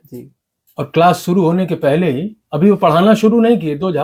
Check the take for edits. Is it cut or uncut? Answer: uncut